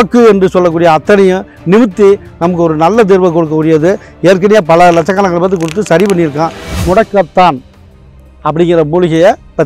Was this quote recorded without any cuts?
no; 1 cut; at 6.6 s

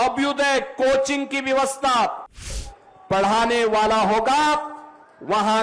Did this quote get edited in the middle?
yes; 1 cut; at 2.5 s

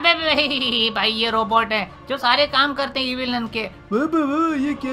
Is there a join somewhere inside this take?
no; 0 cuts

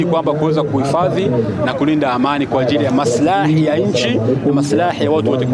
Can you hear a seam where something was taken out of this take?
no; 0 cuts

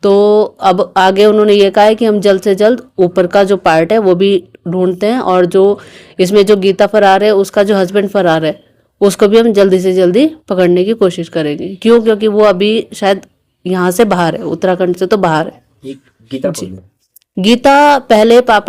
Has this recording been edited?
no; 0 cuts

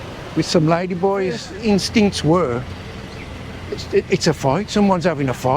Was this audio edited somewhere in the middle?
yes; 1 cut; at 1.5 s

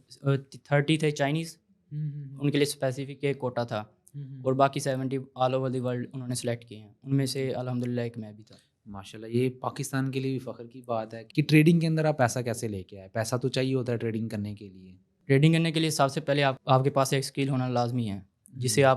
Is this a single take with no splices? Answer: no; 2 cuts; at 11.3 s, 16.6 s

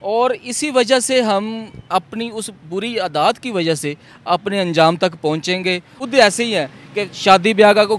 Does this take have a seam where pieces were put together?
yes; 1 cut; at 5.9 s

